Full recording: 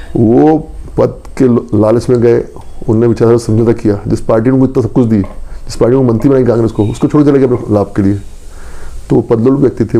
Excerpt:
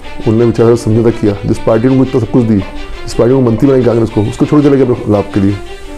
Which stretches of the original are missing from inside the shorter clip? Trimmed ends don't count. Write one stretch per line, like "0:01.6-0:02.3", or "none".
none

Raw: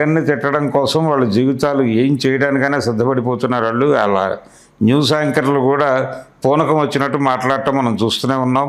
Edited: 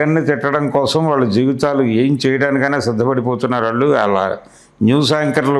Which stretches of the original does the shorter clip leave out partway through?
none

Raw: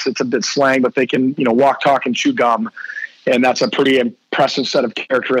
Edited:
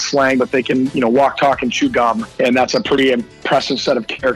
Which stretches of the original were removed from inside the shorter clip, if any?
0:02.7-0:03.1

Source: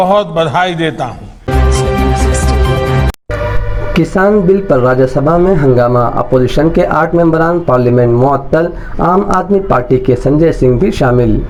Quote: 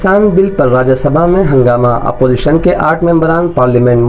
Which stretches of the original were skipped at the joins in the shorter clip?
none

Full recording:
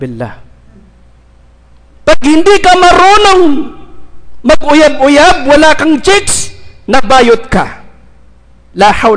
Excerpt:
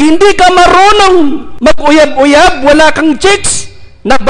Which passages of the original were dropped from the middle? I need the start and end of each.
0:03.7-0:04.3

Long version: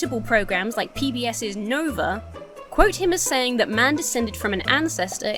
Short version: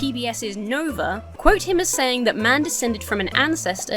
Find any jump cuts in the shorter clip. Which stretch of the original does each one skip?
0:02.3-0:02.6

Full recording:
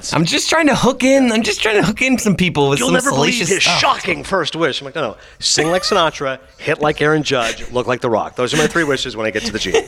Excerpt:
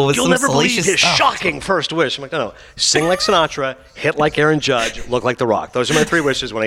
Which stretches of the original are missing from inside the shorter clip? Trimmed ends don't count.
none

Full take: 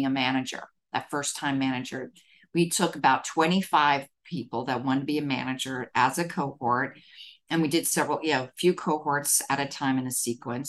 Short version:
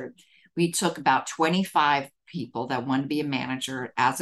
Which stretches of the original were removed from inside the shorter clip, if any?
none

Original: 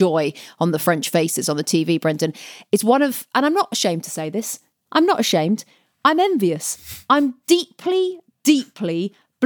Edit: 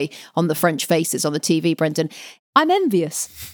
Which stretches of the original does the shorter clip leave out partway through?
0:02.5-0:05.8

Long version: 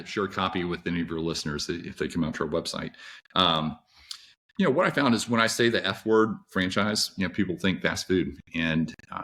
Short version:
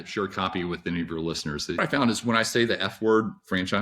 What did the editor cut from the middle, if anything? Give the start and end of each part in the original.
0:01.8-0:04.8

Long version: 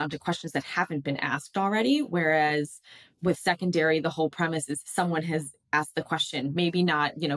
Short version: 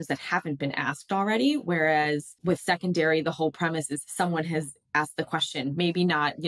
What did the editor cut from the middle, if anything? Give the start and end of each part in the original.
0:02.8-0:03.1

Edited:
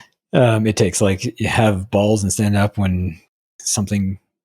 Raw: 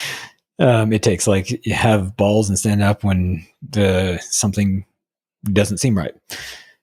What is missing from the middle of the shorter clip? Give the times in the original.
0:03.7-0:04.1

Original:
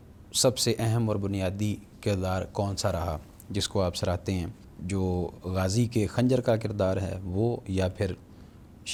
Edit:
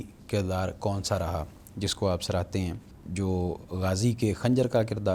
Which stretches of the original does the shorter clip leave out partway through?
none

